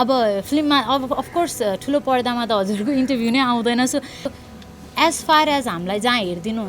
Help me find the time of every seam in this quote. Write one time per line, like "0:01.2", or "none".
0:04.3